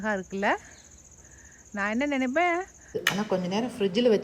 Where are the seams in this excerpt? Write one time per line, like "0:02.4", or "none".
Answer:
0:03.0